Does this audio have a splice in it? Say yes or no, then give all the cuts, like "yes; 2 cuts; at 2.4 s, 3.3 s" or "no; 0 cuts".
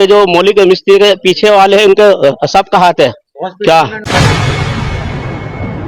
yes; 1 cut; at 4.0 s